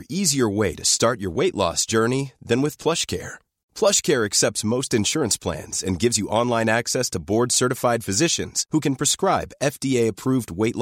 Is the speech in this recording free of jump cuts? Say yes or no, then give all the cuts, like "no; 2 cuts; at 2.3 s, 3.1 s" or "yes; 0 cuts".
yes; 0 cuts